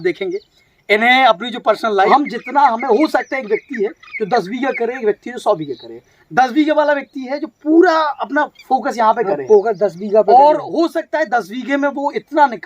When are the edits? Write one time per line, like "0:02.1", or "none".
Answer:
0:02.1